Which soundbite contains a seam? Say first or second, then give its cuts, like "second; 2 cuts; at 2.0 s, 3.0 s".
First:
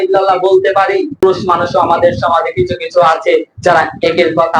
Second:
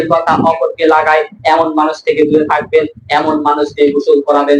first; 1 cut; at 1.6 s